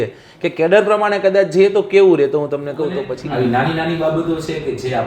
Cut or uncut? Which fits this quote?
cut